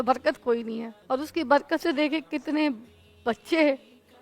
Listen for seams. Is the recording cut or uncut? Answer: cut